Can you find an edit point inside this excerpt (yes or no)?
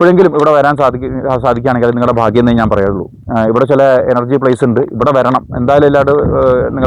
no